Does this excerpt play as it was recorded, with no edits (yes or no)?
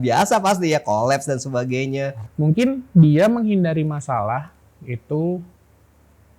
no